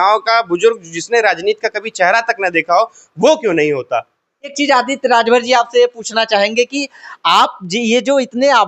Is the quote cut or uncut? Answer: cut